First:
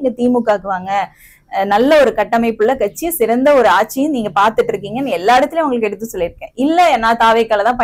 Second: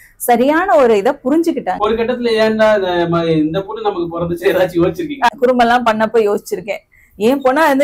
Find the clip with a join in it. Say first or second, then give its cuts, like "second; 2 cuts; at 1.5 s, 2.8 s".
second; 2 cuts; at 1.7 s, 5.3 s